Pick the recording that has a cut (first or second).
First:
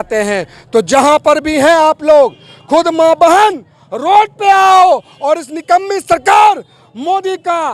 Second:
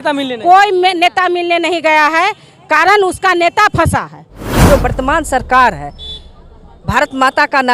second